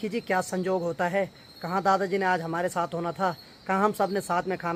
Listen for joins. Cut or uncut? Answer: uncut